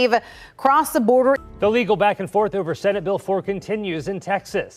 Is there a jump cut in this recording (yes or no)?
yes